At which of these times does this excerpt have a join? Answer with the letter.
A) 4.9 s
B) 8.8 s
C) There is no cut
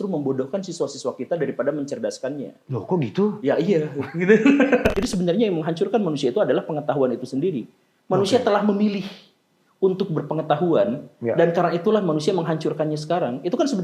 A